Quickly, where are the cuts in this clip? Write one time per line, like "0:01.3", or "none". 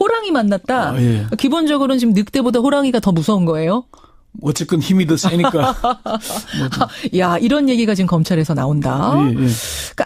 0:06.7